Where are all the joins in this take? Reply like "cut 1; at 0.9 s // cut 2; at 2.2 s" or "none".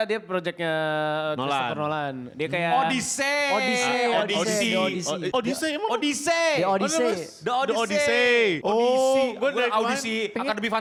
none